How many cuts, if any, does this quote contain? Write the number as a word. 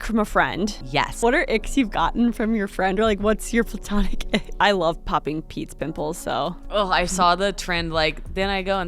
three